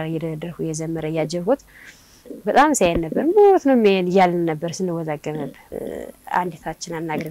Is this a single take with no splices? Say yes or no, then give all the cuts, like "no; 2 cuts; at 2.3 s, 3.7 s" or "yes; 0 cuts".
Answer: no; 1 cut; at 5.7 s